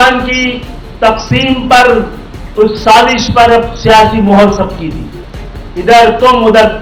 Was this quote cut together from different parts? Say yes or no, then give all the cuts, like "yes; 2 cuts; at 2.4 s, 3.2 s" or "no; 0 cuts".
no; 0 cuts